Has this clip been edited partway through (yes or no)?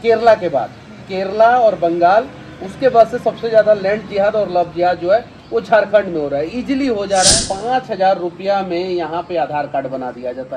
yes